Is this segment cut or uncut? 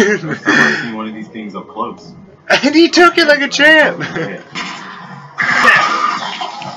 cut